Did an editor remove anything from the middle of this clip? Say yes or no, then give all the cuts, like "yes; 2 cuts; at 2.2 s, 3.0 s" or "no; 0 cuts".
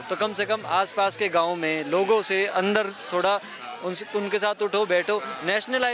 no; 0 cuts